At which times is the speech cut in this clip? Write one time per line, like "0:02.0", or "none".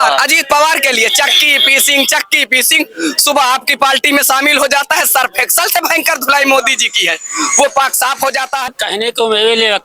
0:08.7